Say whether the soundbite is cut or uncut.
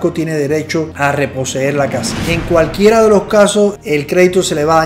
cut